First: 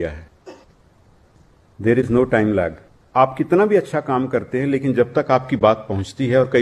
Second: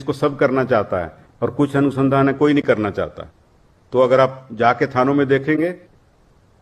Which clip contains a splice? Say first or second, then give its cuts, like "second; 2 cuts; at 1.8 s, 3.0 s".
first; 1 cut; at 3.0 s